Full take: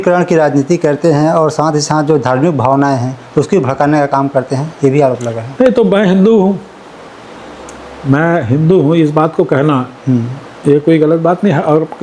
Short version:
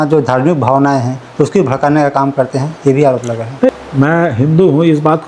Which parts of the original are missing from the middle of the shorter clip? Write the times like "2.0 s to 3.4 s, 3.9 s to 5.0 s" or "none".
5.7 s to 7.8 s